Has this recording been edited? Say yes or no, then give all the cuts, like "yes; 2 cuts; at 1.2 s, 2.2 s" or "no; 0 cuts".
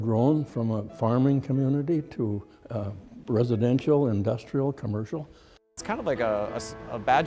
yes; 1 cut; at 5.4 s